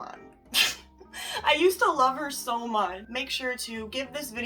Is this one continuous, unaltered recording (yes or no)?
no